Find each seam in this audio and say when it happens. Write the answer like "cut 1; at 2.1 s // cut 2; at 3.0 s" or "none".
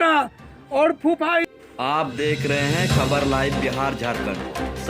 cut 1; at 1.5 s